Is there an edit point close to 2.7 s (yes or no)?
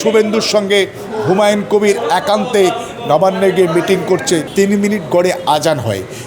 no